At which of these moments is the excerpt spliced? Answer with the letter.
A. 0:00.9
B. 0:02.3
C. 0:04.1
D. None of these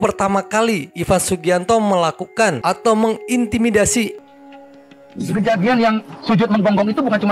C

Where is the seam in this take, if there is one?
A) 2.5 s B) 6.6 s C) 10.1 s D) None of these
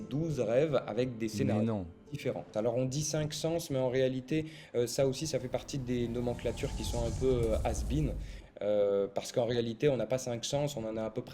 A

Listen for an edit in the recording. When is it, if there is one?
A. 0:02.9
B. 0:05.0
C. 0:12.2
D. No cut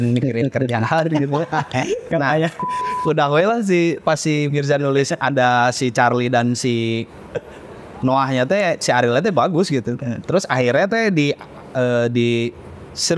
A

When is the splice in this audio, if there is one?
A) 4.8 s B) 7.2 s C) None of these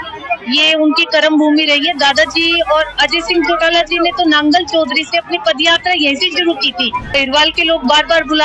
B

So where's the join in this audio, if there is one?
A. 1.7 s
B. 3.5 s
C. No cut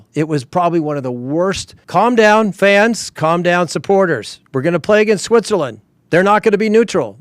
A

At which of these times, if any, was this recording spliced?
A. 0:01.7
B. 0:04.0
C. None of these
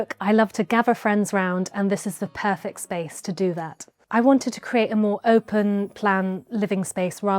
B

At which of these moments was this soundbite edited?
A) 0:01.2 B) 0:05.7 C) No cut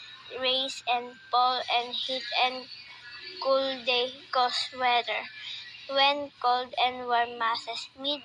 B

